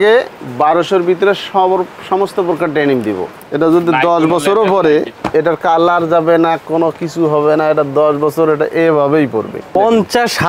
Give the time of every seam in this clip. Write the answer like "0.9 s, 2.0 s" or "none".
3.3 s, 5.2 s, 9.6 s